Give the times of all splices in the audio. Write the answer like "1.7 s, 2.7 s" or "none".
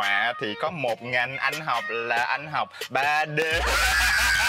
none

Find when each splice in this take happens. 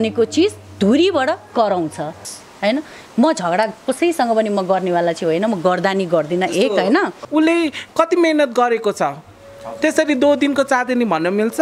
2.3 s, 7.2 s

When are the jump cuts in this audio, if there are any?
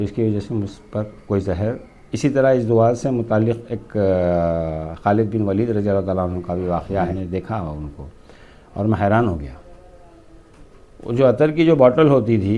7.1 s

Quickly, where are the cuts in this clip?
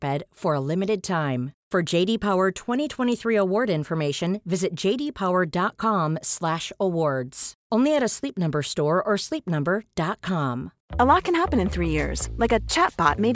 10.8 s

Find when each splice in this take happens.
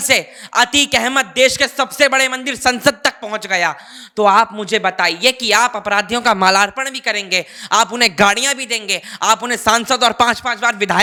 none

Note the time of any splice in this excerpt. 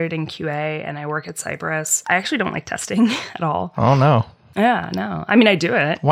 1.9 s

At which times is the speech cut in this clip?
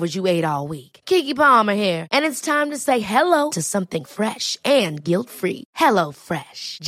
none

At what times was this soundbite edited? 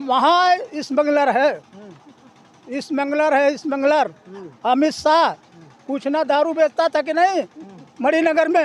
none

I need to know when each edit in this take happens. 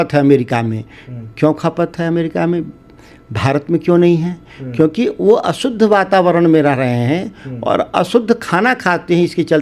none

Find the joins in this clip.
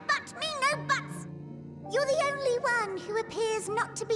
1.3 s

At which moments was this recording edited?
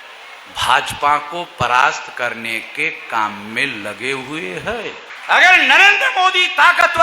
5.1 s

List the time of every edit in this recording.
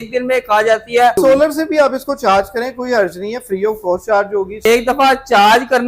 1.2 s, 4.7 s

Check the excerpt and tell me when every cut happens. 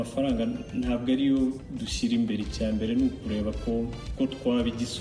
4.0 s

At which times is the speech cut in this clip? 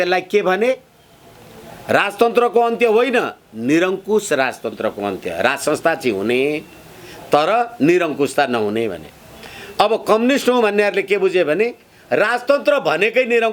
none

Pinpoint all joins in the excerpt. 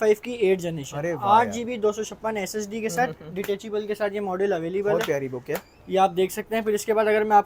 none

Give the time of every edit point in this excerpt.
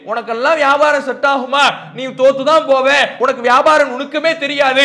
3.1 s

